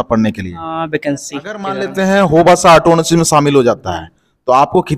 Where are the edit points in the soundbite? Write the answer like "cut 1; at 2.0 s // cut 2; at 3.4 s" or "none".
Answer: cut 1; at 1.8 s